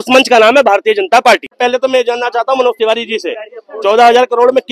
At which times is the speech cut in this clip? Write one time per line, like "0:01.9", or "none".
0:01.6